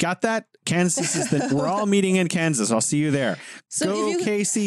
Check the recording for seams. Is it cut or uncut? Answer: uncut